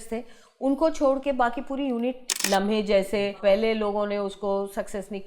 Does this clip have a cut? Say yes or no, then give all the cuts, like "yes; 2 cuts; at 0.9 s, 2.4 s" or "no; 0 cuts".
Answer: yes; 2 cuts; at 2.3 s, 3.4 s